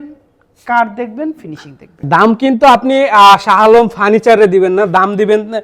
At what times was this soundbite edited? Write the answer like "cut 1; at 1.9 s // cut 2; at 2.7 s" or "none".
cut 1; at 2.1 s